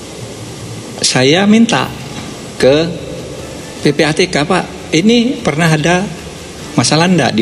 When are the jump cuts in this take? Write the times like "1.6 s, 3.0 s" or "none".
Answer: none